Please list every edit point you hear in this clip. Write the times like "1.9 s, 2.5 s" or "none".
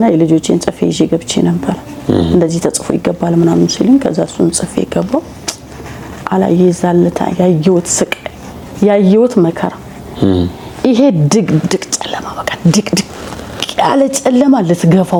none